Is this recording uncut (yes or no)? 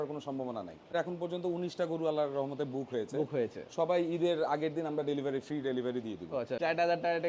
no